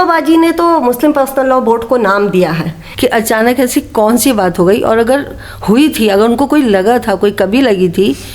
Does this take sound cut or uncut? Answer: cut